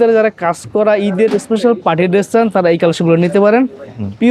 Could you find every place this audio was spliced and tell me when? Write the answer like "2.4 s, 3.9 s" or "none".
none